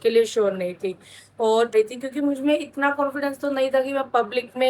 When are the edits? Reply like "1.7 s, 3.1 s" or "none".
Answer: 1.7 s